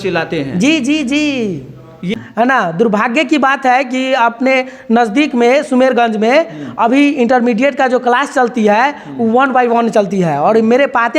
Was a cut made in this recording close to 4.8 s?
no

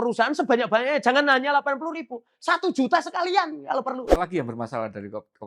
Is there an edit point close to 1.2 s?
no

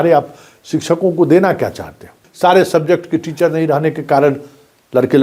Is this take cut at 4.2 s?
no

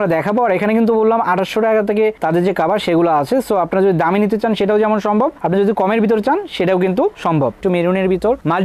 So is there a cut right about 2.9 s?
no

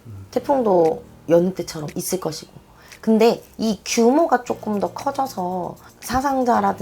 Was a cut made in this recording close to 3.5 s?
no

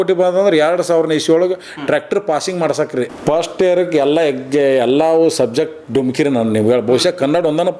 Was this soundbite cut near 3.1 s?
yes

